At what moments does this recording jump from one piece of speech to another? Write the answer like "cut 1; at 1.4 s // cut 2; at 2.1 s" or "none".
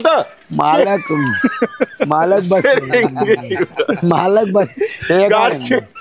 none